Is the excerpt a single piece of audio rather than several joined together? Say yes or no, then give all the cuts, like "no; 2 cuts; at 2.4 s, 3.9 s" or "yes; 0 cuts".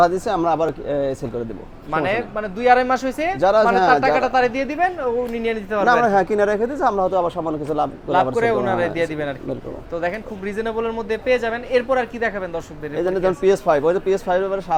yes; 0 cuts